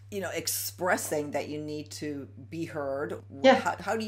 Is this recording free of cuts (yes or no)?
no